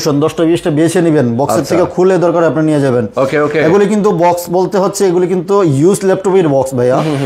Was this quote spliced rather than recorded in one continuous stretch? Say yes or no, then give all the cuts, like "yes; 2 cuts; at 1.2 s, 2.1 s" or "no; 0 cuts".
no; 0 cuts